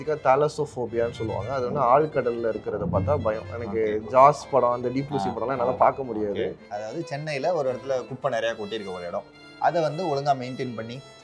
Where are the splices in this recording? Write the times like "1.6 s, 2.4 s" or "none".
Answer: 6.6 s